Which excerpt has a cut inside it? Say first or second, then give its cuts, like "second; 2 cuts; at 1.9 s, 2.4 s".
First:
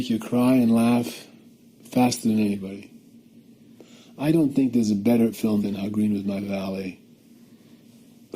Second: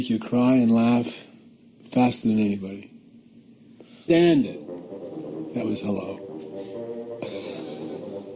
first; 1 cut; at 3.9 s